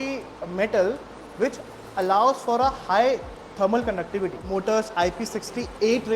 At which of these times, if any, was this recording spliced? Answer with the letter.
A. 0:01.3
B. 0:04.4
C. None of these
B